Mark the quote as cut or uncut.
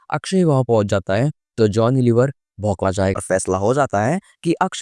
cut